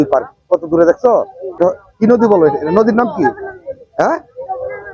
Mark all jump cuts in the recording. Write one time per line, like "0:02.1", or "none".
0:01.4